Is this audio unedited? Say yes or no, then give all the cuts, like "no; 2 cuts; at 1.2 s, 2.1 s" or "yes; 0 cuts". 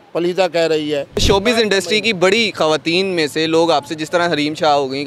no; 1 cut; at 1.2 s